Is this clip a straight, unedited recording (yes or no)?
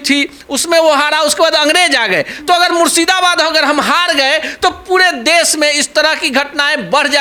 yes